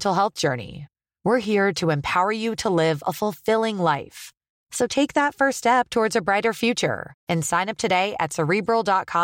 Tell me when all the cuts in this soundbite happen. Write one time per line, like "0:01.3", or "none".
none